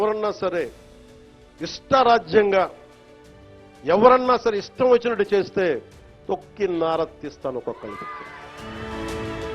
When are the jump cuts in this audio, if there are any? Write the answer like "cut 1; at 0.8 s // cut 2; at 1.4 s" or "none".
cut 1; at 8.6 s